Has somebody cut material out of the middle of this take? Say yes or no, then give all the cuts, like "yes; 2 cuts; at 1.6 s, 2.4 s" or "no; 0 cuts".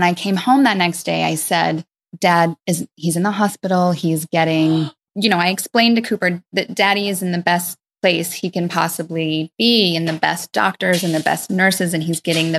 yes; 2 cuts; at 2.1 s, 5.0 s